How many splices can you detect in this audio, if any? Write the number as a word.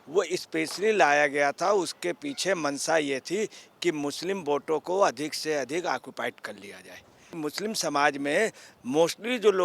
one